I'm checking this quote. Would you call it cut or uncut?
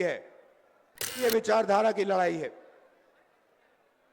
cut